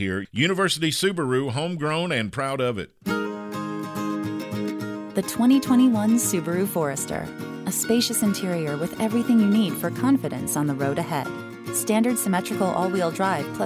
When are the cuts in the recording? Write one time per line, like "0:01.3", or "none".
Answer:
0:02.9